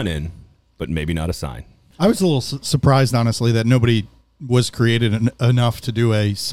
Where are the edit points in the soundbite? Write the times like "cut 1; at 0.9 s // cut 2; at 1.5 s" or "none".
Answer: cut 1; at 1.8 s